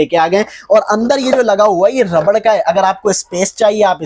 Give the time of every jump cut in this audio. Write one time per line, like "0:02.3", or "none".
none

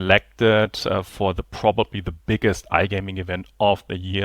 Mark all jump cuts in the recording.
none

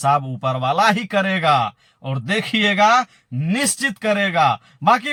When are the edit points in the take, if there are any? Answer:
none

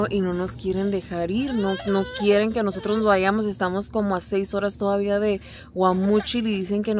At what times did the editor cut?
none

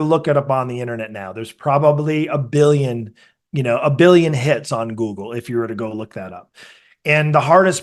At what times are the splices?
none

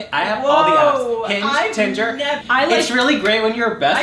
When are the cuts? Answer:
0:02.4

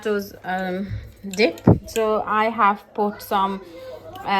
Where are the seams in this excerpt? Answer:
none

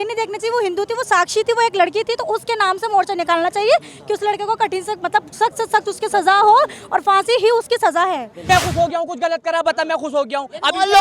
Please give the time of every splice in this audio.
0:08.3

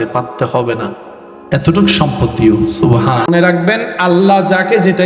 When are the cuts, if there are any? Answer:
0:03.3

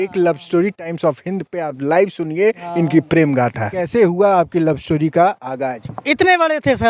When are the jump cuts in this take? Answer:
0:03.8

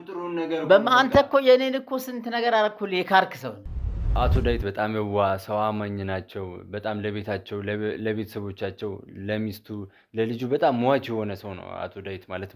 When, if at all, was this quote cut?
0:04.1

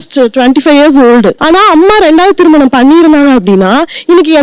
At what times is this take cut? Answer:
0:01.4

